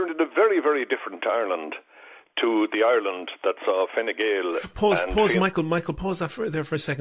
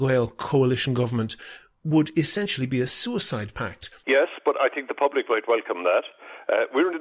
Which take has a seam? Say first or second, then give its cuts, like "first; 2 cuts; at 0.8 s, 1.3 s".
second; 1 cut; at 3.9 s